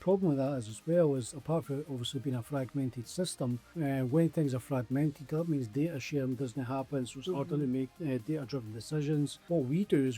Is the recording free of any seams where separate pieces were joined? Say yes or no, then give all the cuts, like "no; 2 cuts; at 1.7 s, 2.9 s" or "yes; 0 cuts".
no; 3 cuts; at 3.7 s, 7.9 s, 9.4 s